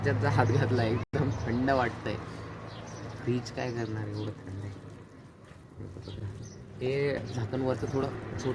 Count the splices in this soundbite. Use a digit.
0